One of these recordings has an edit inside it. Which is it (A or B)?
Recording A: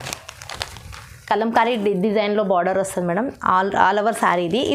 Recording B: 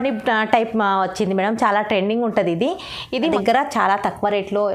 B